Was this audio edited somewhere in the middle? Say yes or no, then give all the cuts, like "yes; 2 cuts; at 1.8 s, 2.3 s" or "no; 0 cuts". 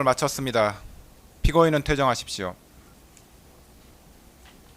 yes; 1 cut; at 2.9 s